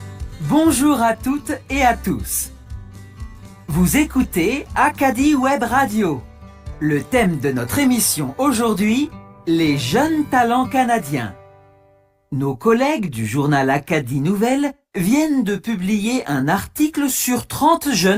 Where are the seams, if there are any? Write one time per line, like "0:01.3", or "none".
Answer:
none

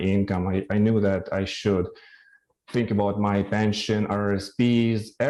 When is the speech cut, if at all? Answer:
none

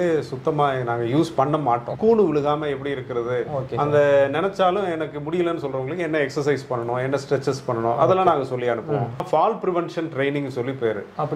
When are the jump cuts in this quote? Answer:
0:01.9
0:09.2

